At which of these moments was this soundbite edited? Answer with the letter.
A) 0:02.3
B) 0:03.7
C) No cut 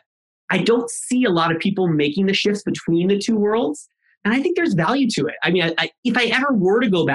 C